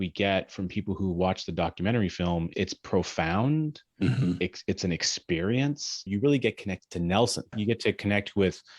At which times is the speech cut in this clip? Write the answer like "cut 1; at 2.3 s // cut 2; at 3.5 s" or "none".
cut 1; at 2.5 s // cut 2; at 4.4 s // cut 3; at 6.1 s // cut 4; at 7.5 s